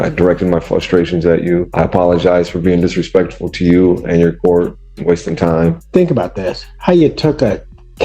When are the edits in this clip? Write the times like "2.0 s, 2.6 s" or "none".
1.7 s, 5.8 s